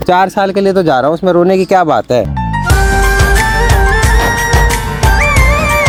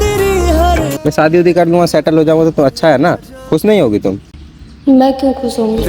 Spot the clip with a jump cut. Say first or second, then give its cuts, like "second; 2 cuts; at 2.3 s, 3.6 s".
second; 1 cut; at 0.9 s